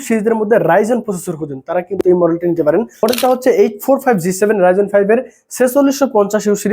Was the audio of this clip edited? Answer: yes; 1 cut; at 3.0 s

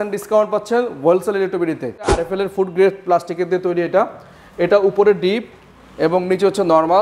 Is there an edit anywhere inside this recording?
yes; 1 cut; at 2.2 s

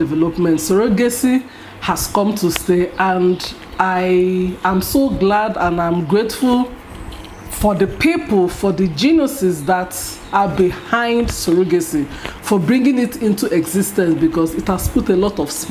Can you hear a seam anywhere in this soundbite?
no; 0 cuts

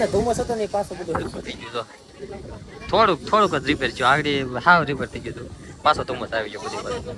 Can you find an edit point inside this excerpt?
no; 0 cuts

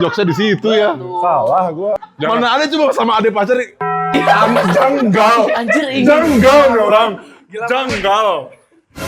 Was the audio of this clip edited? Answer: yes; 1 cut; at 2.1 s

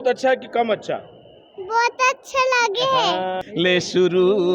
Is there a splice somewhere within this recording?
yes; 1 cut; at 3.4 s

